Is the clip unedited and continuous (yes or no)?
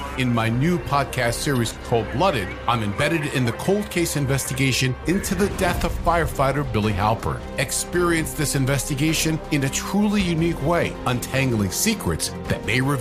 yes